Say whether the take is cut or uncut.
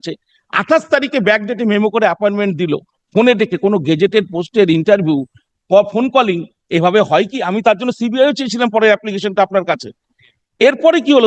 uncut